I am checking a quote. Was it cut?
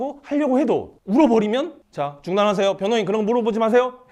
yes; 1 cut; at 0.9 s

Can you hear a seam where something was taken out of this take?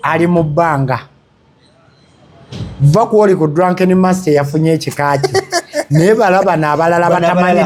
no; 0 cuts

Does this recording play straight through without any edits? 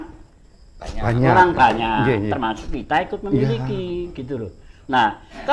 yes; 0 cuts

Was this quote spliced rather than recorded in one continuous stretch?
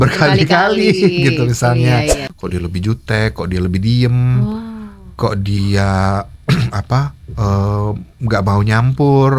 yes; 1 cut; at 2.2 s

